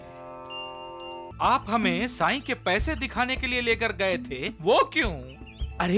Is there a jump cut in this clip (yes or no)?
yes